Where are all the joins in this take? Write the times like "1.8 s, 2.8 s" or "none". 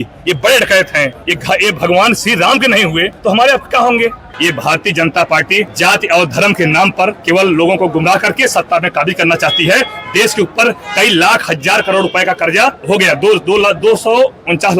1.3 s, 3.1 s, 4.3 s, 5.7 s, 7.2 s, 12.8 s